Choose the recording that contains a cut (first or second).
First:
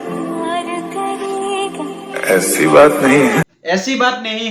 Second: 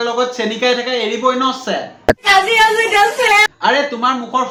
first